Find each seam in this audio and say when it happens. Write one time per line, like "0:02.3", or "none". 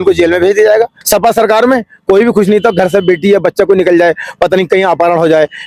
0:01.0